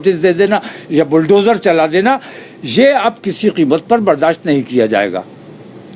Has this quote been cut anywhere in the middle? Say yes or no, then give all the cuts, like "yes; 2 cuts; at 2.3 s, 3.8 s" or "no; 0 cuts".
no; 0 cuts